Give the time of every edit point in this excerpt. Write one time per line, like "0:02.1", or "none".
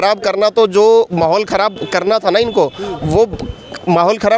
none

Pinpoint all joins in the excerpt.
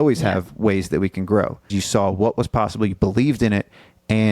0:01.7

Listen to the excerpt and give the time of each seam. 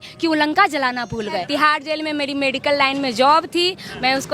0:01.3

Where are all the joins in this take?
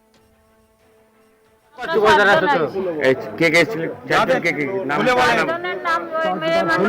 0:01.9

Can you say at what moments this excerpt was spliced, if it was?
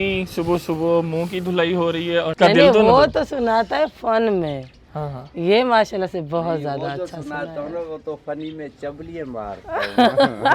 0:02.3

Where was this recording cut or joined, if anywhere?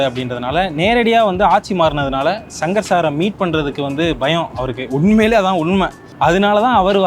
0:06.0

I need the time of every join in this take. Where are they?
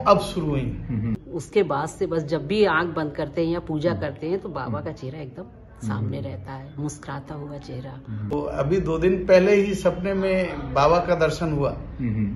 0:01.2
0:08.3

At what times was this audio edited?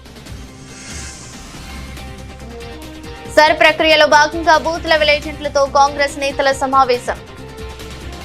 0:07.2

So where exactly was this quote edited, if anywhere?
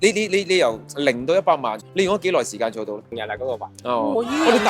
0:01.8
0:03.1

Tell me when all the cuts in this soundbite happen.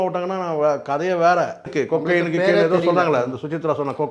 0:01.7

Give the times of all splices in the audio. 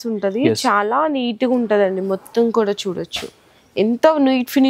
none

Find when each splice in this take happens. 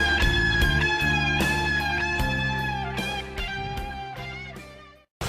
0:01.0

